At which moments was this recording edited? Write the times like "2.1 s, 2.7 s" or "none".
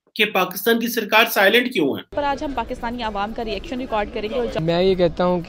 2.1 s, 4.6 s